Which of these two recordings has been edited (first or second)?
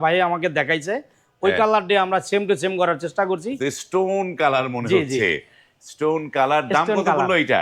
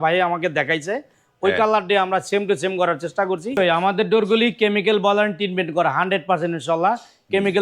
second